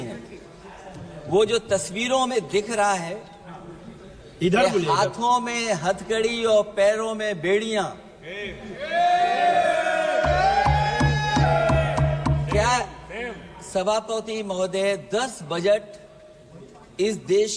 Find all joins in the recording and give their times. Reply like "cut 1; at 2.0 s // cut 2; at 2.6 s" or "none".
none